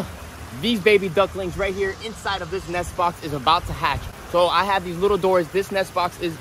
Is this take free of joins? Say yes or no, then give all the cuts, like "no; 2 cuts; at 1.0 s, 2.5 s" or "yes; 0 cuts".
yes; 0 cuts